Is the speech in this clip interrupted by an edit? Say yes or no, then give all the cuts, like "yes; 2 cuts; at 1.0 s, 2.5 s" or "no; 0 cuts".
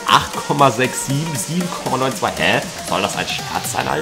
no; 0 cuts